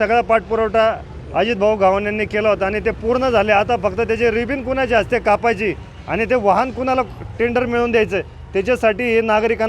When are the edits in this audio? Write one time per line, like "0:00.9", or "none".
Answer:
none